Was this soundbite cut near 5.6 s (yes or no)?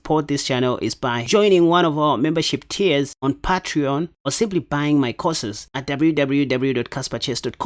yes